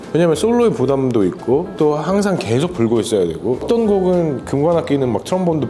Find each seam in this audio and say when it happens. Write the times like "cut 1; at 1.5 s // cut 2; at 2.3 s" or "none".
none